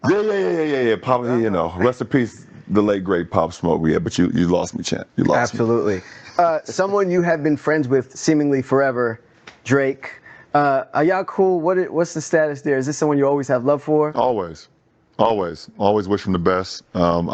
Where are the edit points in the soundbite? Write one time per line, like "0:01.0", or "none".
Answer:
0:01.2